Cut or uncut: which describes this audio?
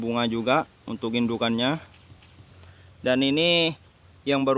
uncut